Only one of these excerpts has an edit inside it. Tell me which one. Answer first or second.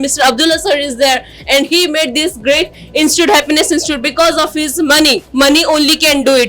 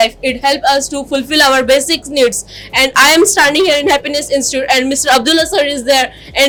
first